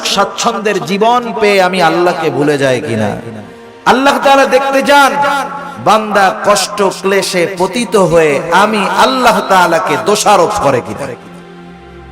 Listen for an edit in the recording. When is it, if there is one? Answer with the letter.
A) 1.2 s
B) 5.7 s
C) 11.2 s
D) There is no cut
C